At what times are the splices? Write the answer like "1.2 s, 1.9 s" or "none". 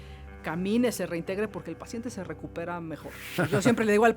3.2 s